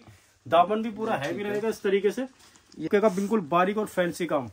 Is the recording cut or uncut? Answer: cut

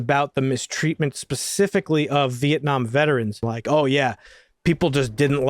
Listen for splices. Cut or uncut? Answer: cut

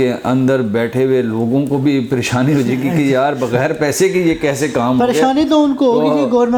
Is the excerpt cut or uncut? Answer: uncut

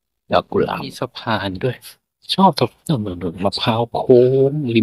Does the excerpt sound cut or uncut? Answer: cut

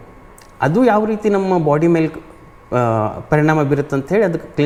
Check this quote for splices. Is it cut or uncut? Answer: uncut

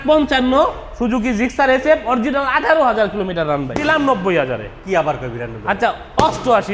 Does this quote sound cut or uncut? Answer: cut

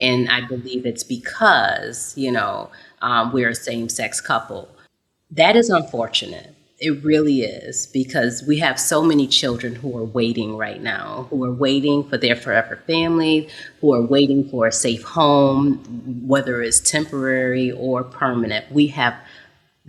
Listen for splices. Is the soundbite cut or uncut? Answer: uncut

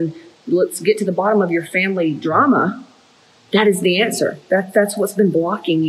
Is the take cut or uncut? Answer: uncut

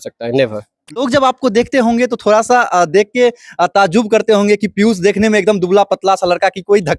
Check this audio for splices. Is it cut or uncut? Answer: cut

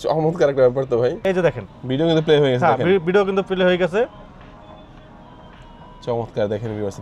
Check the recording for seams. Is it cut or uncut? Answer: cut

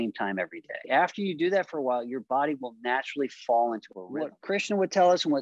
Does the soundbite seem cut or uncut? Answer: cut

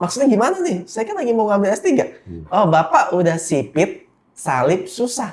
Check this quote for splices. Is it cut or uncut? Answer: uncut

